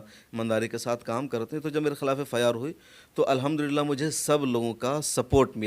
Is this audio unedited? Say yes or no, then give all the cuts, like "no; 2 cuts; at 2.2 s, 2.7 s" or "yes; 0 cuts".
yes; 0 cuts